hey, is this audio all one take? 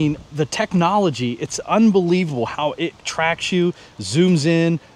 yes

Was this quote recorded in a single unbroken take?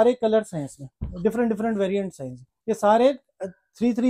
yes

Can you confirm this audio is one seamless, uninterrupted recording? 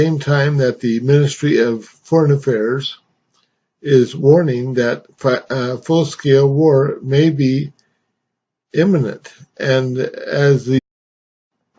yes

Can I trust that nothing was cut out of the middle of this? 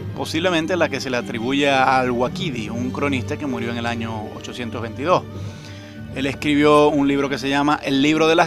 yes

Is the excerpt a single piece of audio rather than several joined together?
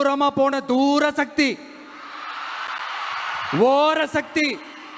yes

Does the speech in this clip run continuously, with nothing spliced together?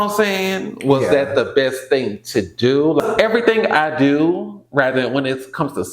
no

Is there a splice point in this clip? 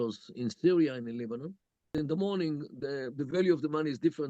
yes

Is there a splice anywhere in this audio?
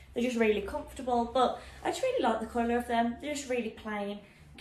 no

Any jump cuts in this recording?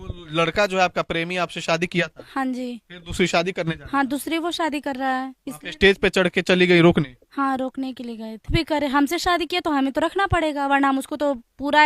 yes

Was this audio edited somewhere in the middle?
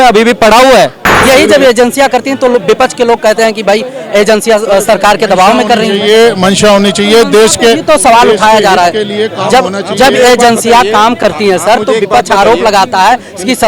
yes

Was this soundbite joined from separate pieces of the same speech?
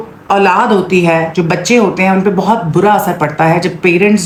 no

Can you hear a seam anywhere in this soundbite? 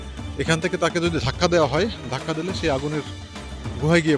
no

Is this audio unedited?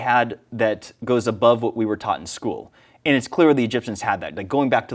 yes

